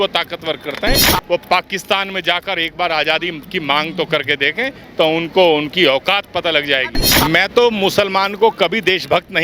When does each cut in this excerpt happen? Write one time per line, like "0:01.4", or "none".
0:01.1
0:07.0